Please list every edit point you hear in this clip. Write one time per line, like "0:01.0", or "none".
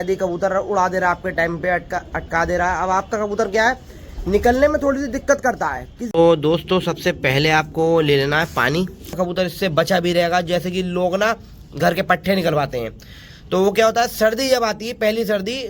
0:06.0
0:09.2